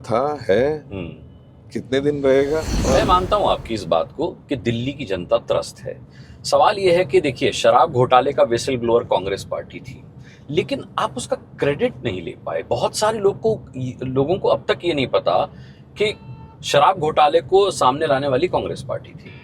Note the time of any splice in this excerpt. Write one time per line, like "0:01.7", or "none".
0:02.7